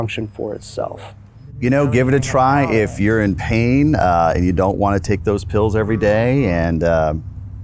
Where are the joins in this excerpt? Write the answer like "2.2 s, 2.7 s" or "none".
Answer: 1.6 s